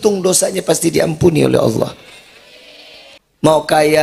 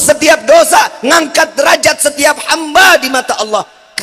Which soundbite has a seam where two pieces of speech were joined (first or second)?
first